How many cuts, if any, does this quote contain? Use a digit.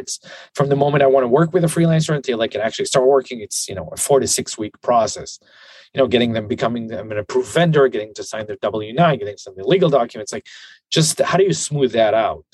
0